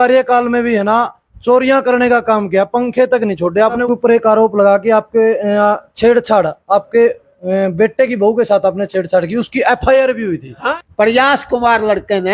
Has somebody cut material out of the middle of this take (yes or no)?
yes